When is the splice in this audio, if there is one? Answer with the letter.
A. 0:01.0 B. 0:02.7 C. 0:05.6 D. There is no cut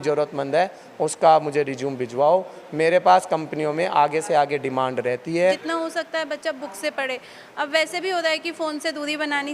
C